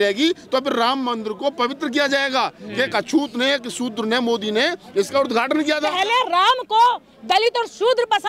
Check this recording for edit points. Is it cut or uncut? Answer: cut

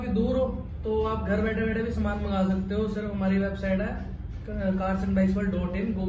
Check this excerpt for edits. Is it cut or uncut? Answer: uncut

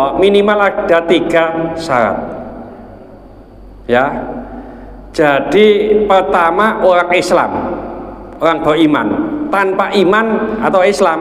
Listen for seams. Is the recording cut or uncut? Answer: uncut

